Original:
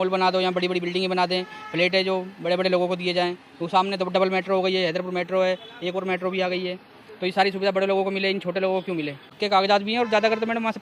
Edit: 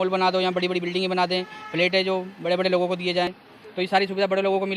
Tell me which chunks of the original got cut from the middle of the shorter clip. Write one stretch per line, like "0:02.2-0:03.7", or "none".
0:03.4-0:06.9